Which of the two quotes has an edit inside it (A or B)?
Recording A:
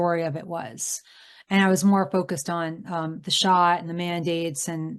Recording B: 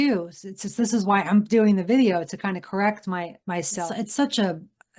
B